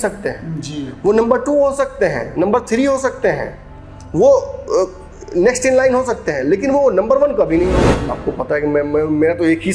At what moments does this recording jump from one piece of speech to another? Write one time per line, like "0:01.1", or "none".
0:08.0